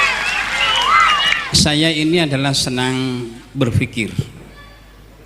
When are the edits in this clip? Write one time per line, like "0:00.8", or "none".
0:01.4